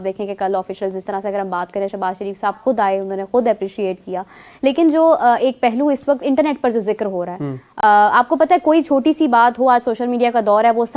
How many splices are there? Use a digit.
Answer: 0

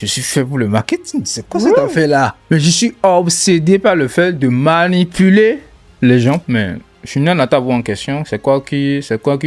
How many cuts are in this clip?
1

